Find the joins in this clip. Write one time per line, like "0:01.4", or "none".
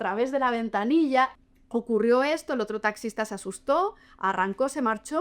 0:01.3